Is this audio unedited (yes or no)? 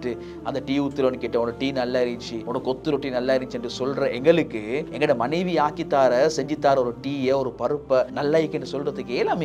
no